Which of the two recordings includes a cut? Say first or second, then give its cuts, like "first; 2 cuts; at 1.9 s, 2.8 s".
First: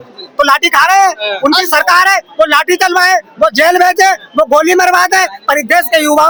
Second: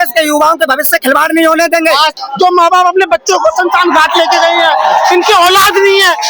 second; 1 cut; at 2.2 s